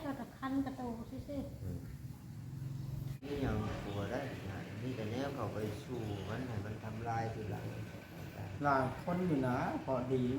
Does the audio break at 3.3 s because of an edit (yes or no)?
yes